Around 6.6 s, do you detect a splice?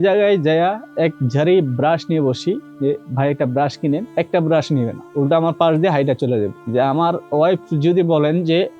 yes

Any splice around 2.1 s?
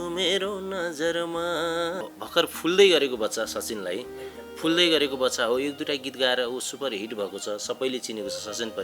yes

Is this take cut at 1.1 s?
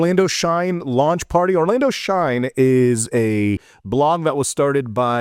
no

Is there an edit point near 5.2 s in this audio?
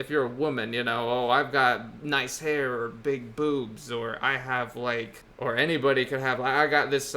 yes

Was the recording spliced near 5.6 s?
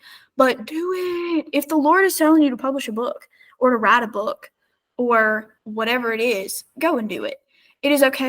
yes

